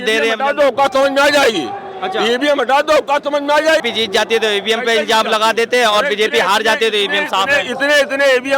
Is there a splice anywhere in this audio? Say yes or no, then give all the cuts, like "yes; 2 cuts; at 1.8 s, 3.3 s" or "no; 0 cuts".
yes; 1 cut; at 3.9 s